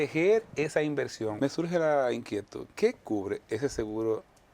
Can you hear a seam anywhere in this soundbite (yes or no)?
yes